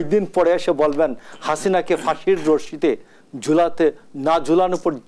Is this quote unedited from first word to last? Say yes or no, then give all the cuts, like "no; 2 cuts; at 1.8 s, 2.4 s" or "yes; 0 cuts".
yes; 0 cuts